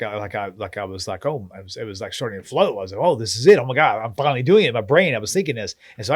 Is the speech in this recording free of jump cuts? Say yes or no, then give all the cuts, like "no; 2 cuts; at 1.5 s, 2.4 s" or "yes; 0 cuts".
yes; 0 cuts